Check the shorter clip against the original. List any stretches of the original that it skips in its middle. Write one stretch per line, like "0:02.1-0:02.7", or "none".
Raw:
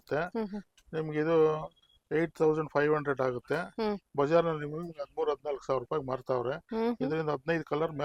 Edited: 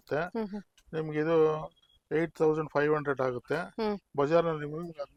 none